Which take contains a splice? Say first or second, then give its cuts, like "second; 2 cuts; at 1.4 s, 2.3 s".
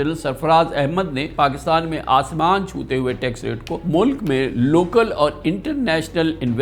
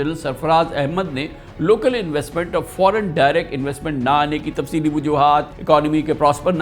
first; 2 cuts; at 1.3 s, 3.7 s